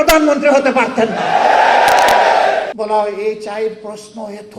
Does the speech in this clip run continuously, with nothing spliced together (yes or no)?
no